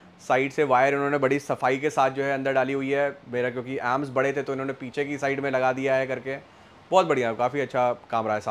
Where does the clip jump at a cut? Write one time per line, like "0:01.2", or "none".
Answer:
none

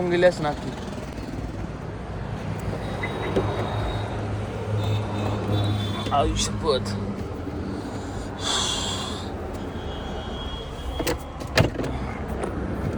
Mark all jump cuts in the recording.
none

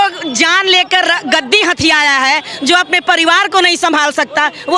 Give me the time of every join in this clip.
none

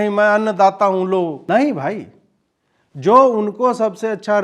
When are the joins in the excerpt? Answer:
0:01.4

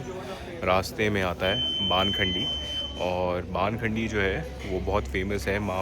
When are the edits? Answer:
none

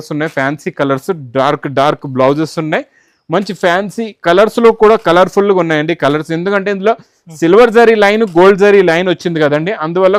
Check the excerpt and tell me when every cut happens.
none

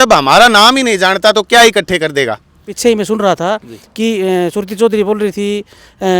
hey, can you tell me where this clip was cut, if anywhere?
0:02.7

